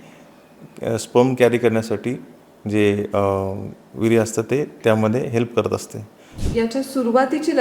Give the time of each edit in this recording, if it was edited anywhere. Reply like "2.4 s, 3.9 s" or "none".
6.3 s